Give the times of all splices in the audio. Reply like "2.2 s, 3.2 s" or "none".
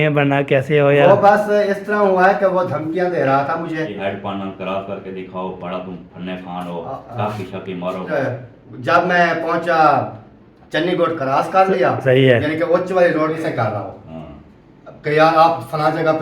3.9 s, 8.1 s, 13.4 s